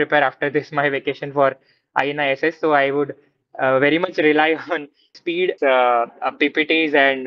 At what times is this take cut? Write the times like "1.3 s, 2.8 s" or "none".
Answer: 5.5 s